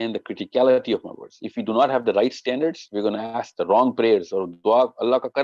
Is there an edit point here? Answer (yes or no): no